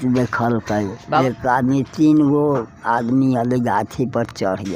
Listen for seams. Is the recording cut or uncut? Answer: cut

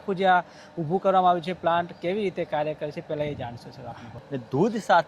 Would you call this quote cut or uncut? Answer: cut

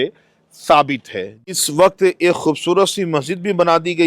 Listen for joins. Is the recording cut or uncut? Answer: cut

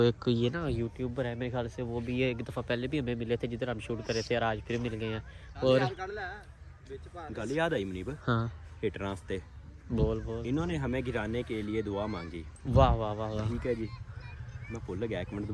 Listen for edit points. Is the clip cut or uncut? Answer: uncut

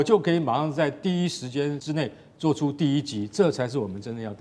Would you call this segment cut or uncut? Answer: cut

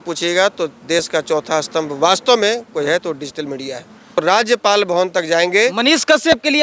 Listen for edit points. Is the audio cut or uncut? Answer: cut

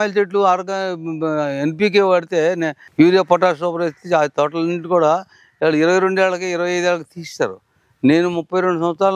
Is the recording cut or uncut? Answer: uncut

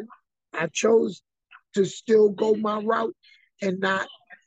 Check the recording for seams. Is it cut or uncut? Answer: uncut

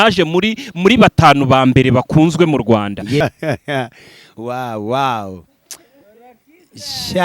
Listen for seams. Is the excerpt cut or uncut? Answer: cut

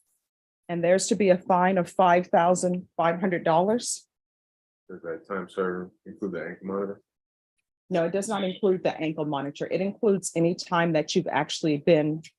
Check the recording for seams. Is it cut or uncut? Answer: uncut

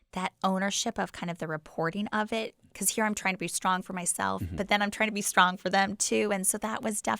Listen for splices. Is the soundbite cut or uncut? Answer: cut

